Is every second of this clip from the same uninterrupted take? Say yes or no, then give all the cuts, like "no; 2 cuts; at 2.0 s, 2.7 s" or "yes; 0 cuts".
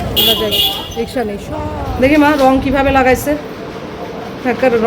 no; 1 cut; at 2.1 s